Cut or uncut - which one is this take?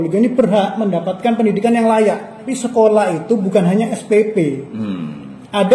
cut